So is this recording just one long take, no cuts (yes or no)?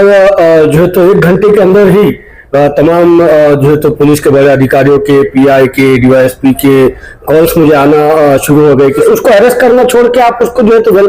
no